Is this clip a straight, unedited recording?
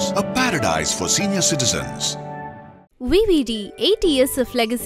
yes; 0 cuts

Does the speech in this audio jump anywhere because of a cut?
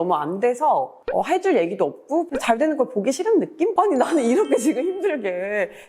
yes; 3 cuts; at 1.0 s, 2.3 s, 3.7 s

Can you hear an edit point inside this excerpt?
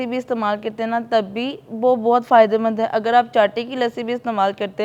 no; 0 cuts

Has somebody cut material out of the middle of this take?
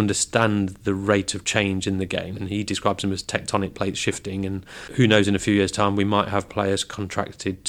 yes; 2 cuts; at 2.3 s, 4.8 s

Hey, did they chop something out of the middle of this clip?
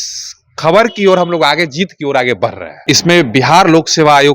yes; 1 cut; at 2.7 s

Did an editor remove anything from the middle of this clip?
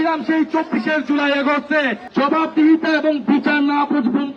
yes; 1 cut; at 2.0 s

